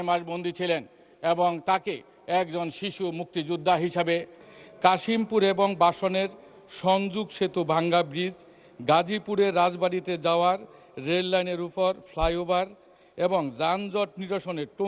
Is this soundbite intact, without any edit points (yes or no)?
no